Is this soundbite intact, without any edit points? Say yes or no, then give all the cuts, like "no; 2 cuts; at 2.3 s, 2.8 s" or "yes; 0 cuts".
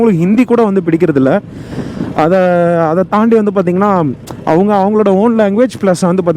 yes; 0 cuts